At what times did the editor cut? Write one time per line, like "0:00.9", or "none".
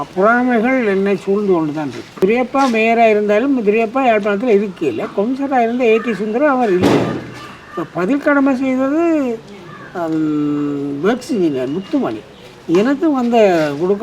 0:02.2

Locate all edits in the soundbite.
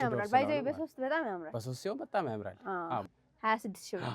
0:03.0

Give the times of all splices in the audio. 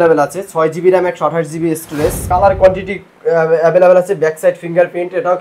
0:02.2

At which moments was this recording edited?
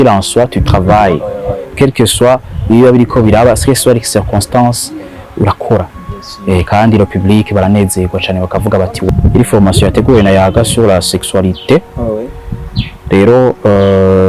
0:09.1

